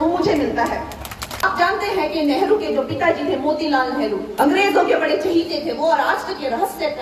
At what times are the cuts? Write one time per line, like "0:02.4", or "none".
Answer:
0:01.4
0:04.3